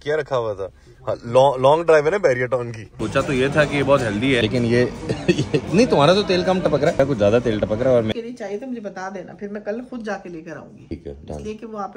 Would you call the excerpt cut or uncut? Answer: cut